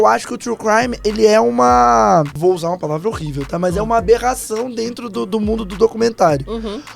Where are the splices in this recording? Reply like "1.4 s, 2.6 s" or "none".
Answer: 2.3 s